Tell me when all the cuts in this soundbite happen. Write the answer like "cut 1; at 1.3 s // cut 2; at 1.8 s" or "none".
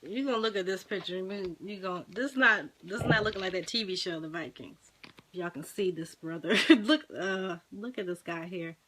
none